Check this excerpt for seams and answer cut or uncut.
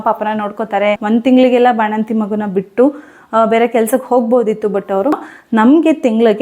cut